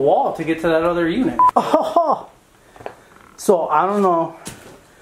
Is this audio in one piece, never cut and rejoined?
no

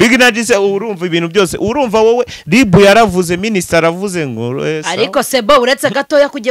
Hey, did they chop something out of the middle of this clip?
no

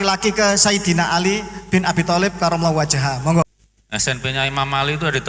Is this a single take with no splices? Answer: no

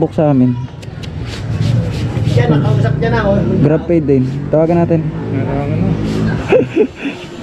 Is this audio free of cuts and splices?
yes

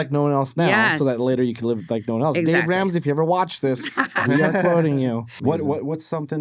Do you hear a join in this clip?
yes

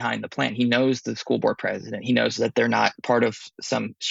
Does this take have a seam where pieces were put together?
yes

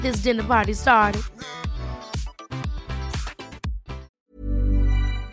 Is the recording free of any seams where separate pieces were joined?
no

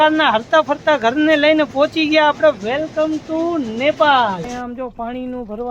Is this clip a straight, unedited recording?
no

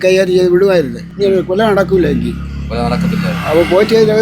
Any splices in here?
no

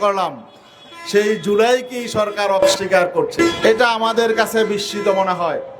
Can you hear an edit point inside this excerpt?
yes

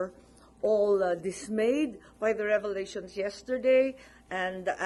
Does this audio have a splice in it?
no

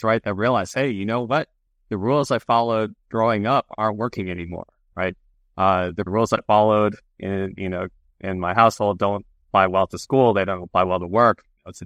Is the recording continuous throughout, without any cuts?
yes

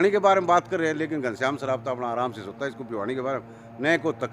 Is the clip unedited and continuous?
yes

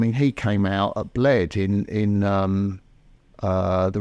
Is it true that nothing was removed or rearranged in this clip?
yes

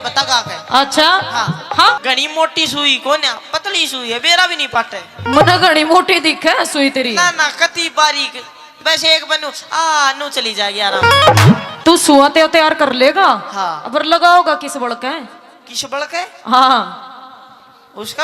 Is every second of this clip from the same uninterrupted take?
no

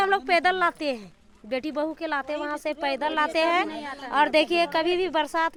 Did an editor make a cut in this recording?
no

